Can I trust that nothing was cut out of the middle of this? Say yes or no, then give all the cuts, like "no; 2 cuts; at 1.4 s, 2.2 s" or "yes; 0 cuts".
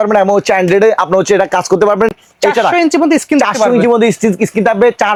yes; 0 cuts